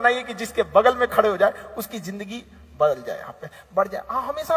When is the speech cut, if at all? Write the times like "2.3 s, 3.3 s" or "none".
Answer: none